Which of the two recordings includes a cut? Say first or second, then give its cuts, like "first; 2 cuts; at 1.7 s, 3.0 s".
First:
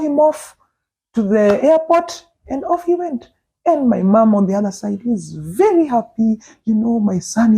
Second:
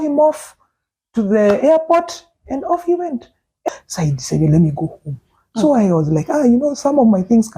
second; 1 cut; at 3.6 s